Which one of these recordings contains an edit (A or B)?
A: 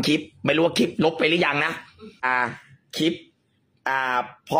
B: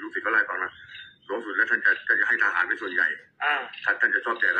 A